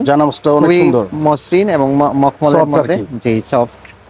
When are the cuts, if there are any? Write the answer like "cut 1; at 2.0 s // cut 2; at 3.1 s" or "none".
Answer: none